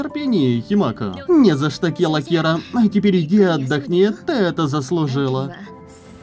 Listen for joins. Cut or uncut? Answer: cut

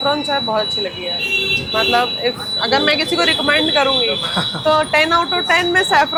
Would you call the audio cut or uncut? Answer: uncut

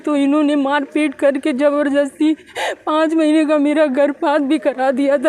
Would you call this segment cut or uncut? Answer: uncut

